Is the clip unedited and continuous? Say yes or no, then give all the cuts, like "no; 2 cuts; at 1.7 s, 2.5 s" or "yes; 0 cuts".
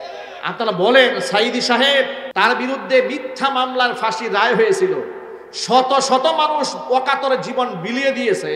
no; 1 cut; at 2.2 s